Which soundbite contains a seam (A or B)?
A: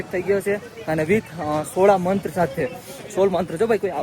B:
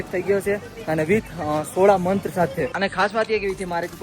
B